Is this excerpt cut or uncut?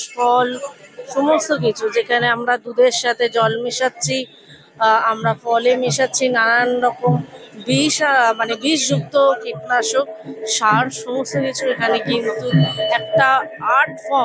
uncut